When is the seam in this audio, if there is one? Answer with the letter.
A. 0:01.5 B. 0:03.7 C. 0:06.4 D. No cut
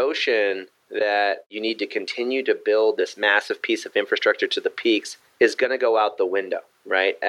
A